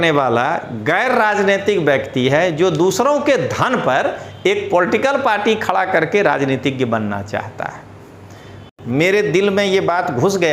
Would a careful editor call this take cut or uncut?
cut